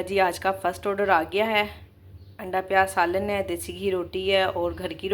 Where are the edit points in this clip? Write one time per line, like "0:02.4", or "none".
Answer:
none